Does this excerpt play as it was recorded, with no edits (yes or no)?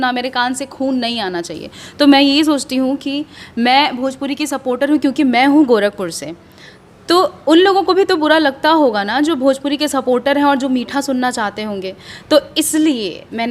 yes